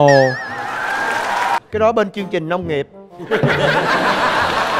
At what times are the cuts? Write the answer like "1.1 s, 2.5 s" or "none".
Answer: 1.6 s